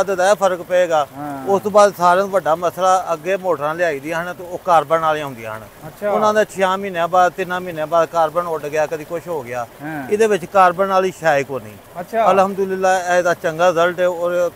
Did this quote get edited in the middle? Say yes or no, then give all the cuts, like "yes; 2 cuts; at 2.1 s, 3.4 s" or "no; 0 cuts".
no; 0 cuts